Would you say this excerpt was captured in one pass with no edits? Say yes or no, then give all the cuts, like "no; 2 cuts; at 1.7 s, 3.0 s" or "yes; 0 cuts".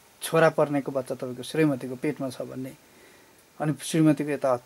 yes; 0 cuts